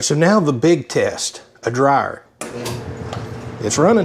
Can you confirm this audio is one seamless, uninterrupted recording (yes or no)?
no